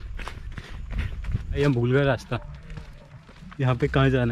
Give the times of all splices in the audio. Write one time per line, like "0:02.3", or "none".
0:01.6